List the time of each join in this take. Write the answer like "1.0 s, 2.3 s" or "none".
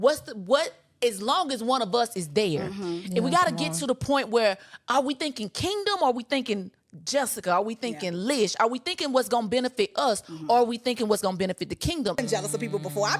12.2 s

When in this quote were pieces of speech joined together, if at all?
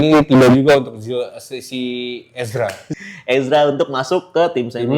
2.8 s

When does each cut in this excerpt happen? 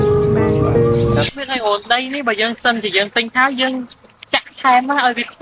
1.3 s

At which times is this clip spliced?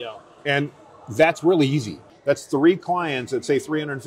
2.1 s

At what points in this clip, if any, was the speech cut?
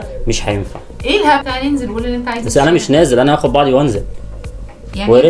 1.4 s

